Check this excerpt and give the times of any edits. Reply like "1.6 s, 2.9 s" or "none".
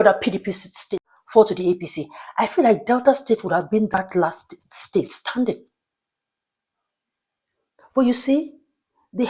1.0 s